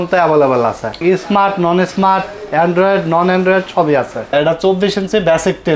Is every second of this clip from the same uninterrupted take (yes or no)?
no